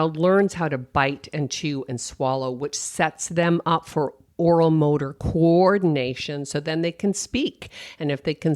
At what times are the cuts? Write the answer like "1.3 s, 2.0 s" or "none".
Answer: none